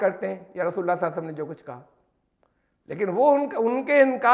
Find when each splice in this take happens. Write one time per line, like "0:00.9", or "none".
none